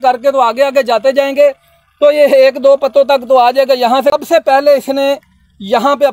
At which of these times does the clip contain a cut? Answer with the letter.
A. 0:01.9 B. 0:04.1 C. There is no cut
B